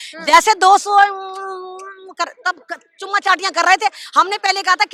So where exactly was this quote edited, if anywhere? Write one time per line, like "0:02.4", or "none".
none